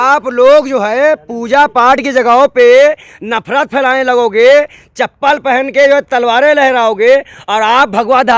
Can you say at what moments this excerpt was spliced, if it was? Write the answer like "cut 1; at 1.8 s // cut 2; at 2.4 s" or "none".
none

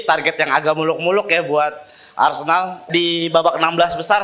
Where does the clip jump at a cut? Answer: cut 1; at 2.9 s

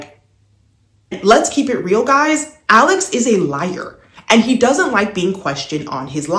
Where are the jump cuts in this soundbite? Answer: cut 1; at 1.2 s

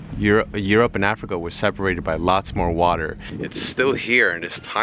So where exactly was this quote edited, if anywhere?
cut 1; at 3.4 s

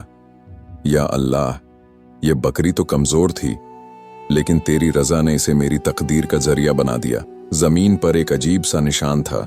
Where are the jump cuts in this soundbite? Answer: cut 1; at 7.4 s

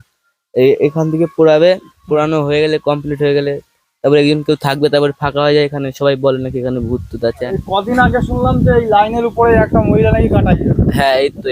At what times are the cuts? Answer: cut 1; at 7.4 s

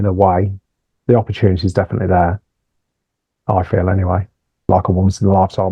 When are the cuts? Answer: cut 1; at 4.6 s

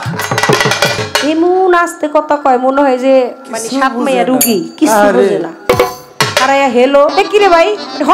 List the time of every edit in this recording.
cut 1; at 1.1 s // cut 2; at 7.1 s

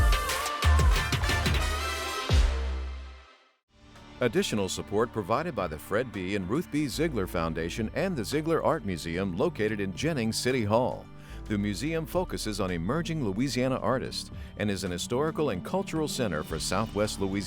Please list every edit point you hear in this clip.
cut 1; at 4.1 s

